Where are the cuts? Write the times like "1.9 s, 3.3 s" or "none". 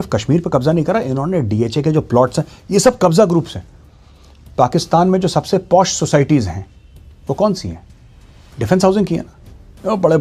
none

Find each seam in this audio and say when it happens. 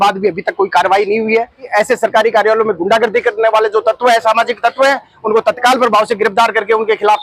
1.7 s

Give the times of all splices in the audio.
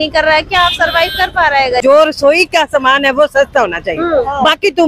1.8 s

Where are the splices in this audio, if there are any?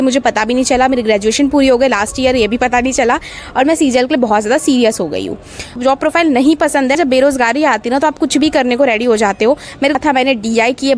5.8 s, 7.0 s, 9.9 s

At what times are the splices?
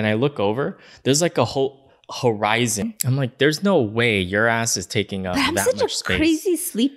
2.8 s

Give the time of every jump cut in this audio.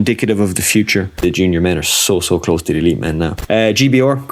1.2 s, 3.4 s

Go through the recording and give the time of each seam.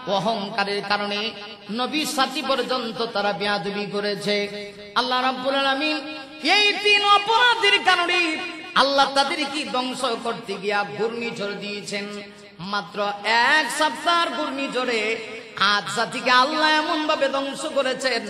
none

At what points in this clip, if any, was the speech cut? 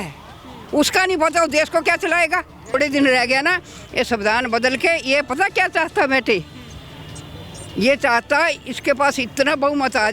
2.7 s

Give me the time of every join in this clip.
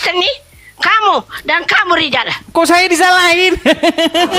none

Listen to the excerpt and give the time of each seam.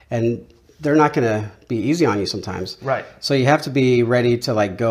none

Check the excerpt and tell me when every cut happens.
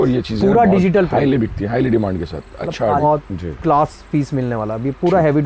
3.0 s

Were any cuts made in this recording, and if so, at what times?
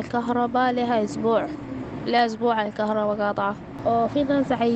3.7 s

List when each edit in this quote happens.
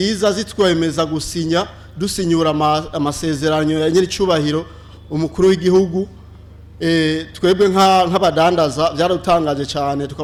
none

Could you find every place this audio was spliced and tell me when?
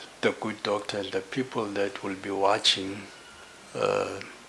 none

